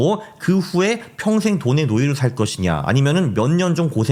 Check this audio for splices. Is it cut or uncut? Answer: uncut